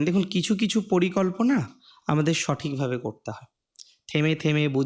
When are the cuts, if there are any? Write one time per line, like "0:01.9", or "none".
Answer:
none